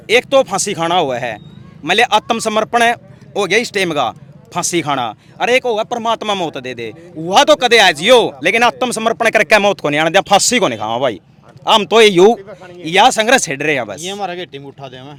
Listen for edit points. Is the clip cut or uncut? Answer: uncut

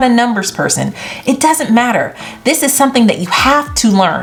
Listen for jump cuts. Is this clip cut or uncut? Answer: uncut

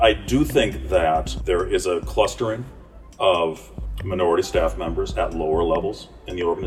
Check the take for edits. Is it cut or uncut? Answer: cut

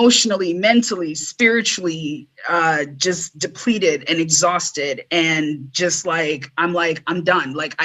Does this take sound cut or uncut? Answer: uncut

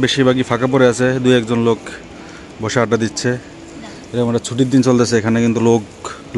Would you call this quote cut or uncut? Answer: uncut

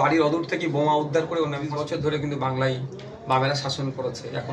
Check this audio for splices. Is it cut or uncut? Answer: cut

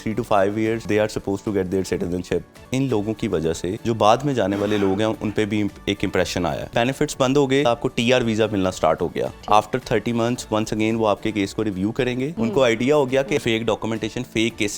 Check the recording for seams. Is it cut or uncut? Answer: cut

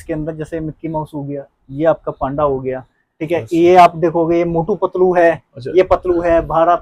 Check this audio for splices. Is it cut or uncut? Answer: uncut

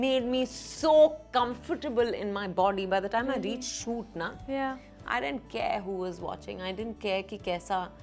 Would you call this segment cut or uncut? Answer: uncut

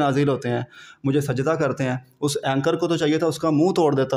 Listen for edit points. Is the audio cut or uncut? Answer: uncut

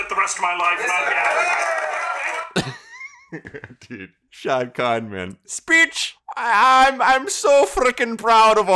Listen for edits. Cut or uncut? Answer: cut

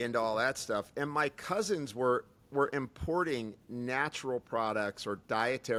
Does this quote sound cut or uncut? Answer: uncut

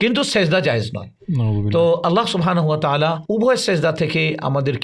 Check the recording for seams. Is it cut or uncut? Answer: uncut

